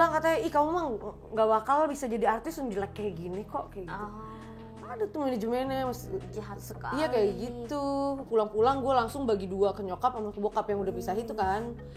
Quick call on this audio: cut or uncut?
cut